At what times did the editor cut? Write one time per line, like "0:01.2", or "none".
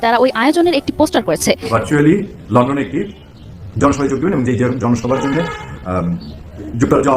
0:01.7

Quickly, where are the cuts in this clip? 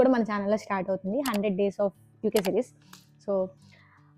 none

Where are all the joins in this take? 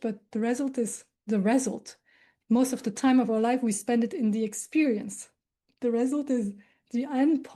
none

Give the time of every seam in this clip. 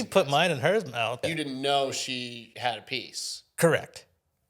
0:01.3

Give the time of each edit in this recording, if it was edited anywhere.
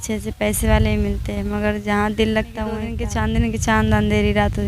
0:03.0

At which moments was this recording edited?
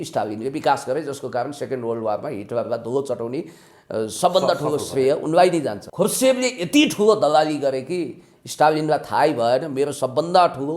0:05.8

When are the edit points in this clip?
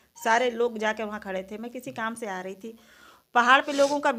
none

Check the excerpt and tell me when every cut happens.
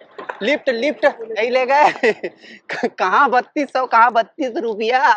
0:01.4

